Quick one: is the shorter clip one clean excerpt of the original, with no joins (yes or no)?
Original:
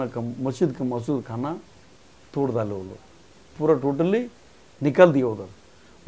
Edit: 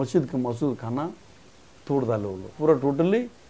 no